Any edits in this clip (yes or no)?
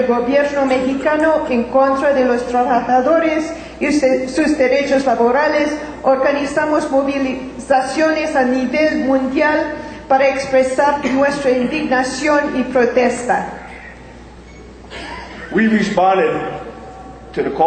yes